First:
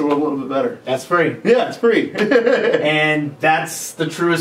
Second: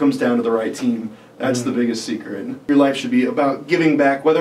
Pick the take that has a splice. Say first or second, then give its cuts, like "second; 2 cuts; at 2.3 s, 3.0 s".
second; 1 cut; at 2.7 s